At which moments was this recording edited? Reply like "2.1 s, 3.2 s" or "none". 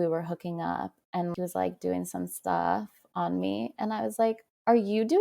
1.3 s